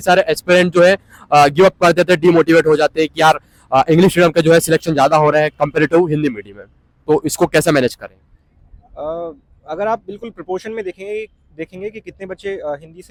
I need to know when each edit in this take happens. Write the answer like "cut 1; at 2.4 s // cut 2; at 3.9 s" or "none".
none

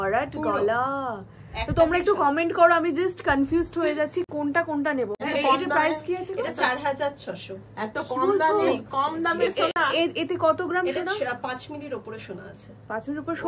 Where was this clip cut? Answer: none

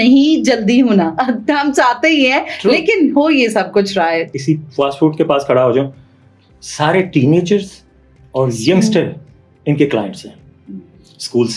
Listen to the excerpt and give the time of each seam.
cut 1; at 4.4 s

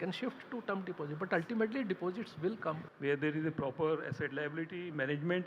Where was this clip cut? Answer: cut 1; at 2.9 s

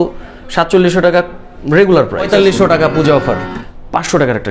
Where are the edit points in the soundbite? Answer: cut 1; at 2.3 s // cut 2; at 3.5 s

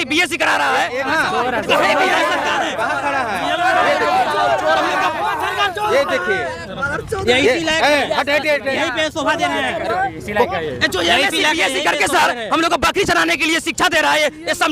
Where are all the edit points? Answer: cut 1; at 1.1 s

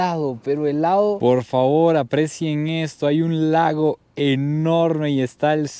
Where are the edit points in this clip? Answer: cut 1; at 1.2 s

